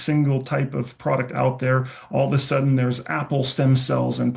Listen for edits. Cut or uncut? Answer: uncut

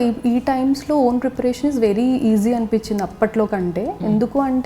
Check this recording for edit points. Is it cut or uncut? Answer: uncut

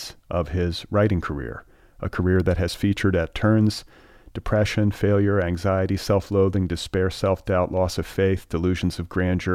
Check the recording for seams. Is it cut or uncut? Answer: uncut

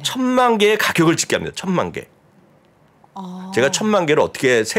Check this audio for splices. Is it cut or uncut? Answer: uncut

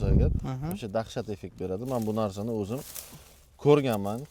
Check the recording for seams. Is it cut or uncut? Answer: uncut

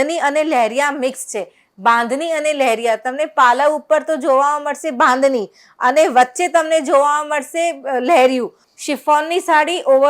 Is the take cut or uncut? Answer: cut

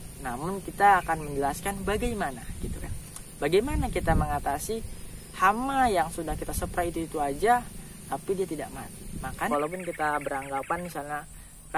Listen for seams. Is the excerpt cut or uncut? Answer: cut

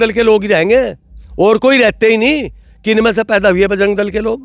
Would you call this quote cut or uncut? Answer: uncut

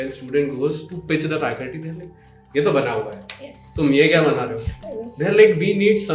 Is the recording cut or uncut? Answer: uncut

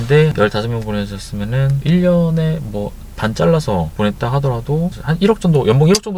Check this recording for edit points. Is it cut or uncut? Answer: cut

